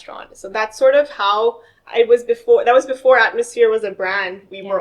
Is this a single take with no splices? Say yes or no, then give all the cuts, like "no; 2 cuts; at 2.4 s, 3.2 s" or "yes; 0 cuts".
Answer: yes; 0 cuts